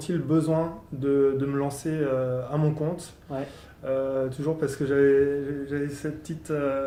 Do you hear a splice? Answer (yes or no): no